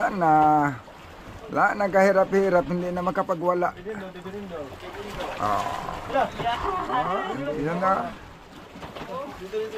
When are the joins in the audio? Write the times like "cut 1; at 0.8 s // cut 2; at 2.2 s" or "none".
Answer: cut 1; at 7.3 s